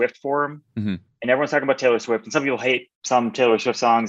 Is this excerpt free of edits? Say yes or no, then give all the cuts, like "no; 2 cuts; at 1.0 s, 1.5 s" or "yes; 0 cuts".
no; 1 cut; at 2.9 s